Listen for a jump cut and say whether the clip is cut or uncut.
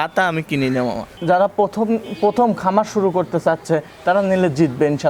cut